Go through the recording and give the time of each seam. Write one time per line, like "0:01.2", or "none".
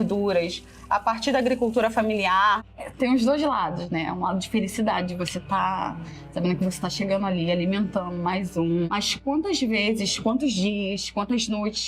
0:02.6
0:08.9